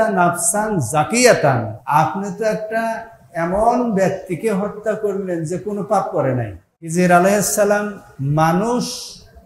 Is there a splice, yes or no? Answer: yes